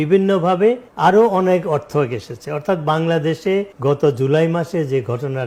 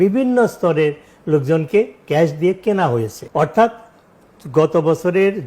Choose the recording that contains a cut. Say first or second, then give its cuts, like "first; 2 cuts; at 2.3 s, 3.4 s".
second; 1 cut; at 3.2 s